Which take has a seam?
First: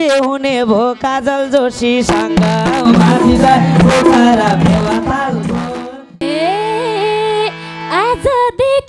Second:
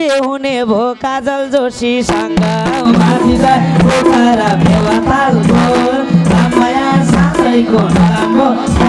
first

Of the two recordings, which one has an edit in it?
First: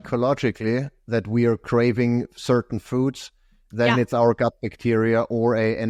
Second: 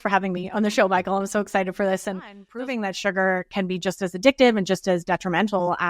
second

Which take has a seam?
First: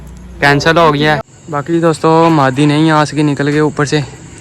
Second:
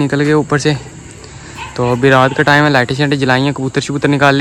first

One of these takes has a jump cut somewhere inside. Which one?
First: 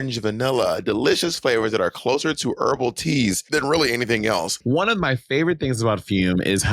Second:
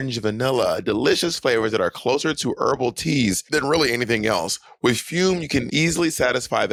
first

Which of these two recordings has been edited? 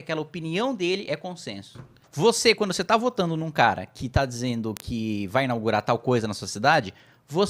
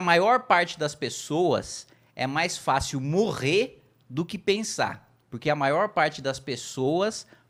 first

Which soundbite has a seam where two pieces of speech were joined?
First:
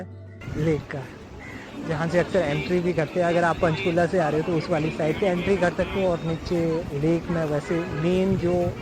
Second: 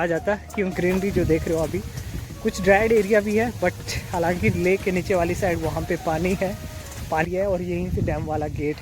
second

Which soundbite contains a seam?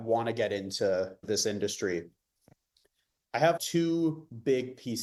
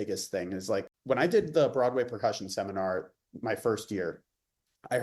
second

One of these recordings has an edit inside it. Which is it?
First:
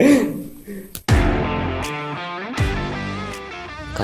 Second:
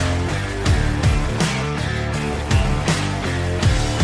first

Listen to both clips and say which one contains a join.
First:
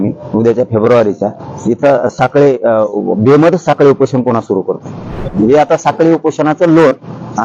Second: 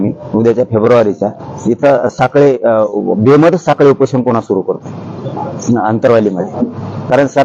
first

